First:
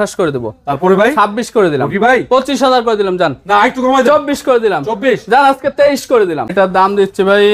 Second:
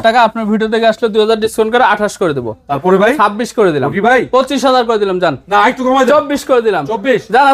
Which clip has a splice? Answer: first; 1 cut; at 6.5 s

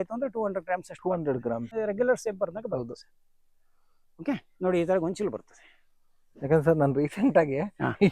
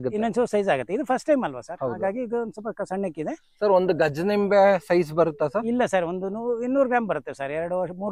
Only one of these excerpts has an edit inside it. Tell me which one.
first; 1 cut; at 1.7 s

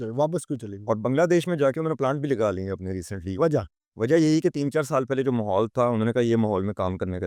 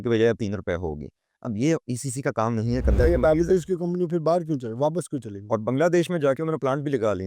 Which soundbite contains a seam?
second; 1 cut; at 2.9 s

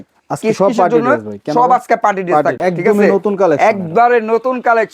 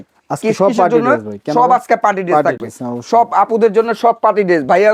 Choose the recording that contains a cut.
first; 1 cut; at 2.6 s

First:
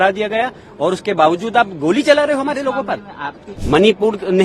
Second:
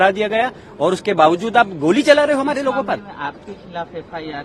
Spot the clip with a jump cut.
first; 1 cut; at 3.5 s

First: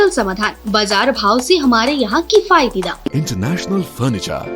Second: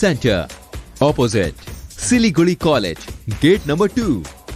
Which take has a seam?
first; 1 cut; at 3.1 s

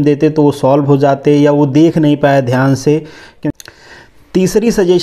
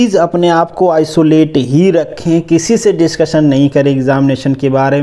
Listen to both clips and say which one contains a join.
first; 1 cut; at 3.3 s

